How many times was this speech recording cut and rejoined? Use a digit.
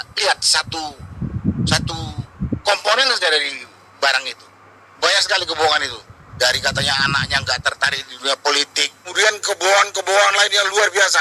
2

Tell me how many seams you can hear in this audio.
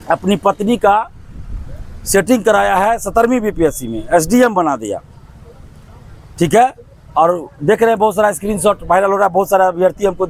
0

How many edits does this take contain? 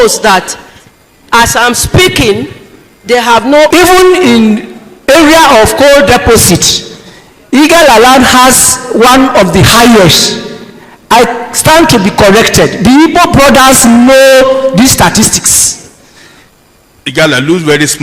2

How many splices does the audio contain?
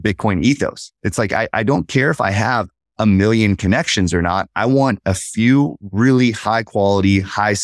0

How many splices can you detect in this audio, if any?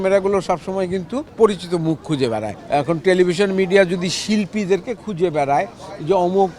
2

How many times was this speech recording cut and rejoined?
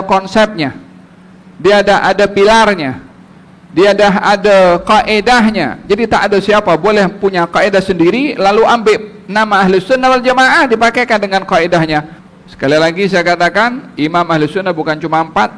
1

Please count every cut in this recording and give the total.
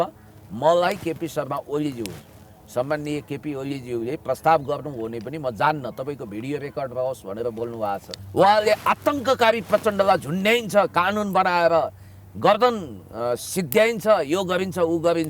1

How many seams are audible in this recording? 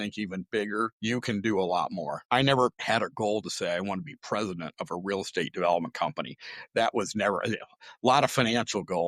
3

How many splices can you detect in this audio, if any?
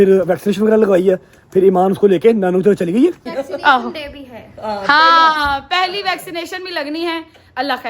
1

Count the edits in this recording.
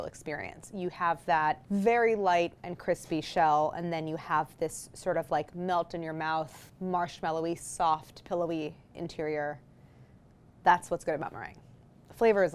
2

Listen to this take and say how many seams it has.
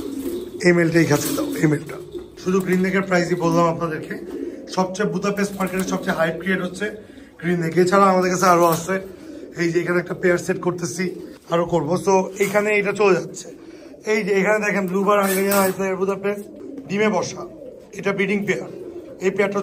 2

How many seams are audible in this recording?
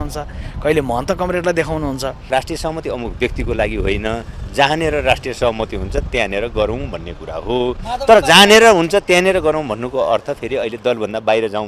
1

